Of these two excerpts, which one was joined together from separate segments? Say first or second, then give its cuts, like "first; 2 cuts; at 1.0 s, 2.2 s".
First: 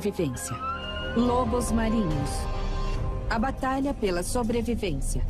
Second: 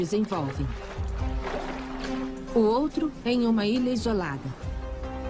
first; 1 cut; at 2.7 s